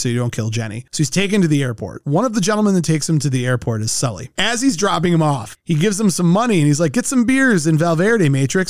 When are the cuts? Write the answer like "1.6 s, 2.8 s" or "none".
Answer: 0.8 s, 4.3 s